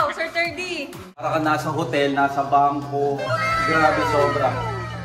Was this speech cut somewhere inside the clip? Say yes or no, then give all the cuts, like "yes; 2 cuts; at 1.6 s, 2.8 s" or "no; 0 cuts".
yes; 1 cut; at 1.2 s